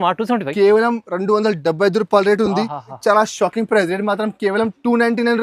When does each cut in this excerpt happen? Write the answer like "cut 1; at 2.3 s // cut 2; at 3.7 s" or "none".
cut 1; at 3.0 s